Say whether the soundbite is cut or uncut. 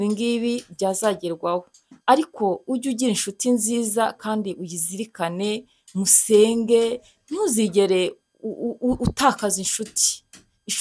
uncut